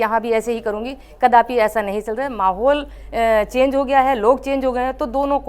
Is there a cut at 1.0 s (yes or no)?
no